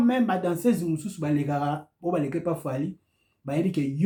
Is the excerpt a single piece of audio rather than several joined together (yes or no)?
yes